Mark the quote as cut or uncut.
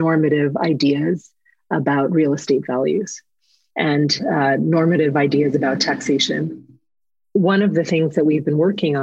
uncut